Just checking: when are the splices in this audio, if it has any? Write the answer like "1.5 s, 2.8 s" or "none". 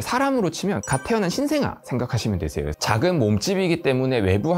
2.8 s